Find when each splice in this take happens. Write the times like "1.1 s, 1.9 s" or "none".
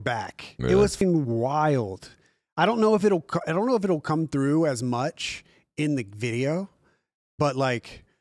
1.0 s